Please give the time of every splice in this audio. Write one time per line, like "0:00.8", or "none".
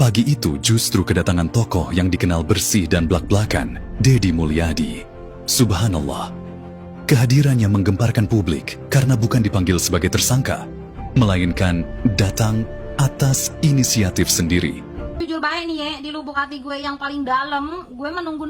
0:15.2